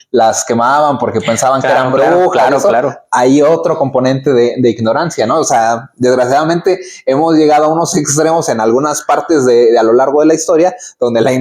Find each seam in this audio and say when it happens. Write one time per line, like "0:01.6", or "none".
none